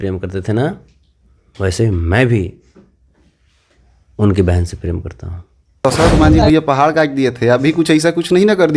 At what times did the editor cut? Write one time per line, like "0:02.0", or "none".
0:05.8